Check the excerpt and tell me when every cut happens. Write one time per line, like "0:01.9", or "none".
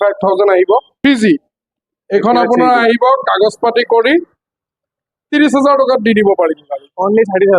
0:00.9